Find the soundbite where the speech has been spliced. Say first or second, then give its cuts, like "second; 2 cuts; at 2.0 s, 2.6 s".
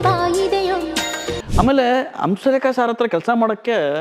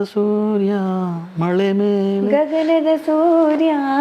first; 1 cut; at 1.3 s